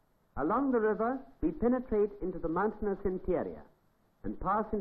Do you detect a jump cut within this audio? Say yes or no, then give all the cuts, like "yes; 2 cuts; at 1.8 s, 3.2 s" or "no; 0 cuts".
yes; 1 cut; at 3.1 s